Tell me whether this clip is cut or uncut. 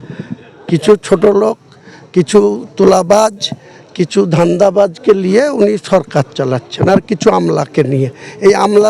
uncut